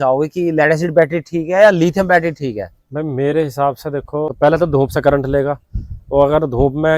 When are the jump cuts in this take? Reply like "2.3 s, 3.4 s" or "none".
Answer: 4.3 s